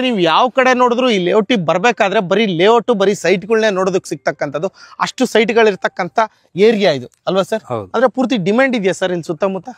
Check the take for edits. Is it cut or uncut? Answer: uncut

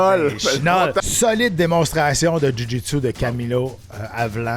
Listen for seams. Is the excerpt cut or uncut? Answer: cut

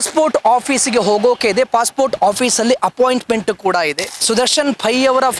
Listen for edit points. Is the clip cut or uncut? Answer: cut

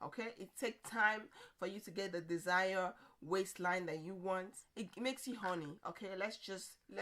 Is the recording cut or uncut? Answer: cut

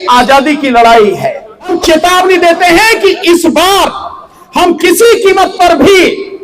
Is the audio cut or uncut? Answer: cut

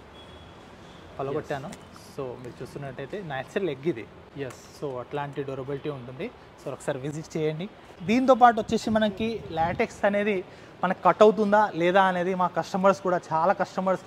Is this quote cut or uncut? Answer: uncut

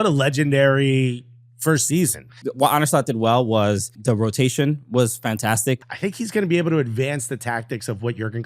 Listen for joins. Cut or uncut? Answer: cut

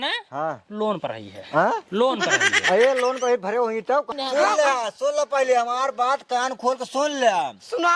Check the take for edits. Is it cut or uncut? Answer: cut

